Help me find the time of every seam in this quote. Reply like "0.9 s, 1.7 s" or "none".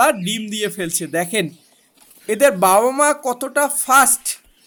none

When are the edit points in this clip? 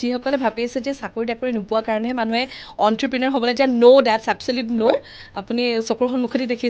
none

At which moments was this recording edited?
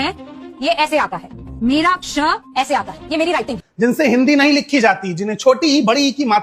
none

